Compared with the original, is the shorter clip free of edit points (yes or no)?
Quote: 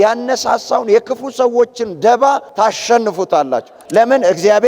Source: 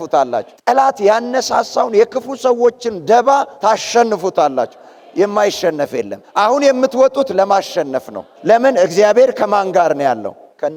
no